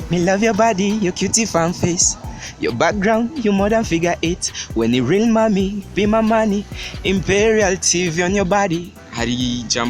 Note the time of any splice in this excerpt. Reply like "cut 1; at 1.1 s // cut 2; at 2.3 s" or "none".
cut 1; at 8.9 s